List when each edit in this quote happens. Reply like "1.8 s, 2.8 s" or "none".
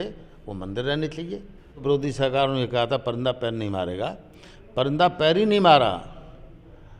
1.8 s